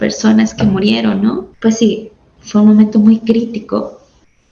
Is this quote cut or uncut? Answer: cut